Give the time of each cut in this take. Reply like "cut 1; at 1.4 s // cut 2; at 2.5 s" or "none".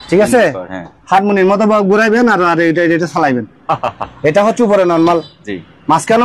none